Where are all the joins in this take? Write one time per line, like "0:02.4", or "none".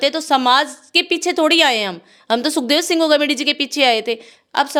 none